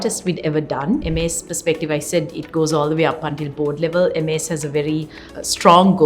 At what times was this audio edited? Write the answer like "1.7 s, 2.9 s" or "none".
1.1 s